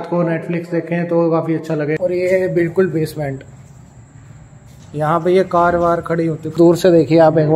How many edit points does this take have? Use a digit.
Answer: 2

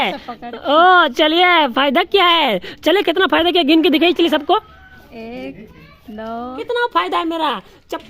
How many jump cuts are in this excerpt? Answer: 1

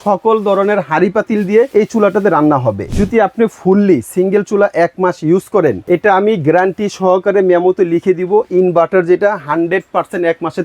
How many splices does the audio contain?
3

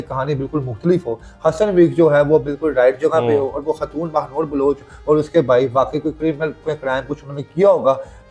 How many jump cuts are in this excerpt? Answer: 0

